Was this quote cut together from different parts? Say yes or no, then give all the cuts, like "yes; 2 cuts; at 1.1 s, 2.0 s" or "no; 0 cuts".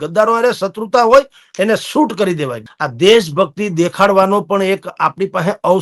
yes; 1 cut; at 2.6 s